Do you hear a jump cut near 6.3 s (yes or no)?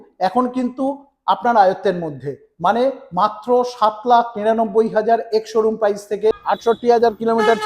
yes